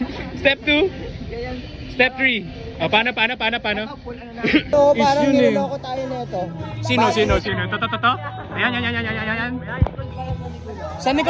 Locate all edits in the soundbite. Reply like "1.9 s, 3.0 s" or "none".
4.7 s